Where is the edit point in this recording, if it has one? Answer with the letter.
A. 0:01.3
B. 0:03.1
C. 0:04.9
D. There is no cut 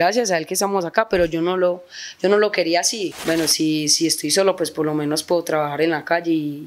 B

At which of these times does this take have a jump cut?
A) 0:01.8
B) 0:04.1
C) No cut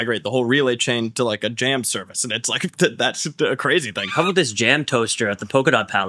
B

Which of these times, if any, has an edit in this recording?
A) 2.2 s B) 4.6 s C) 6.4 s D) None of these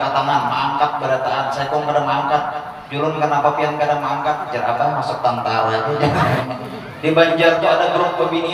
C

